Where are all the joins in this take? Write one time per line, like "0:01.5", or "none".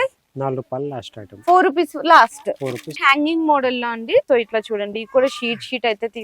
0:02.9